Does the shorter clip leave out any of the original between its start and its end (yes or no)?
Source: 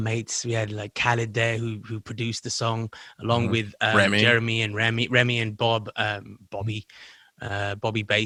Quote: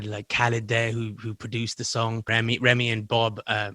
yes